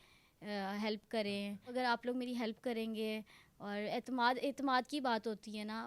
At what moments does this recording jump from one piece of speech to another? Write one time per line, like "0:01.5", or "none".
0:01.7